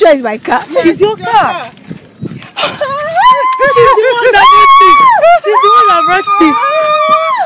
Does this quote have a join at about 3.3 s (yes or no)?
no